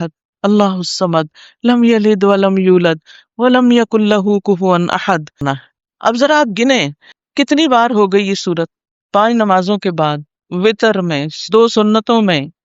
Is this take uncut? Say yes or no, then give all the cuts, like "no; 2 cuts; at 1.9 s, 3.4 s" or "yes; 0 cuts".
no; 1 cut; at 5.3 s